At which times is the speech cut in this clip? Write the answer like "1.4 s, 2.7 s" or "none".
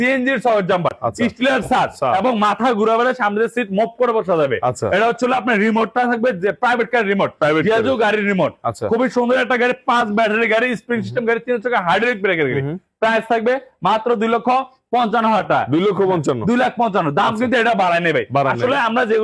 none